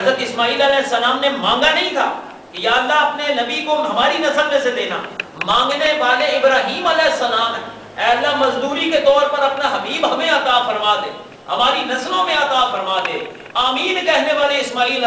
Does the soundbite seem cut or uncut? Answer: uncut